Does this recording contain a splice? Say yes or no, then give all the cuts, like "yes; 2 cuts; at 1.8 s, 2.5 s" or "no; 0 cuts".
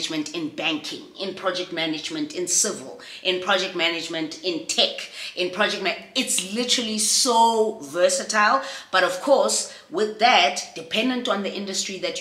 no; 0 cuts